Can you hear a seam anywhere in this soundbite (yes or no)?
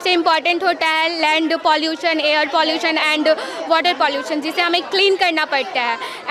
no